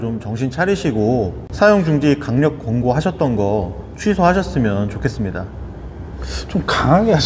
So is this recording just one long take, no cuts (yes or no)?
yes